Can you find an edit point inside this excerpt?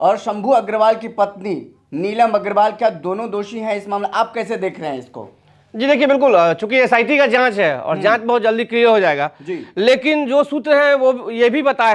no; 0 cuts

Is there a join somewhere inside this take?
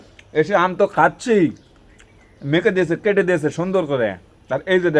no; 0 cuts

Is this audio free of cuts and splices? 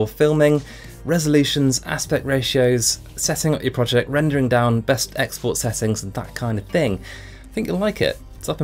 yes; 0 cuts

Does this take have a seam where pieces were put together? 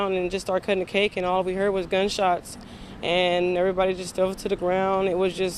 no; 0 cuts

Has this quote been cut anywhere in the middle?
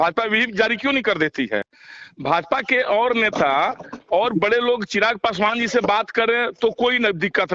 no; 0 cuts

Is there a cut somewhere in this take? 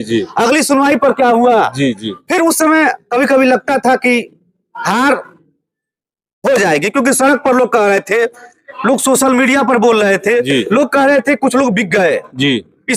no; 0 cuts

